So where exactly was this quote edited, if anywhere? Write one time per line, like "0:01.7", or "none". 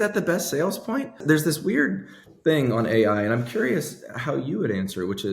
0:01.2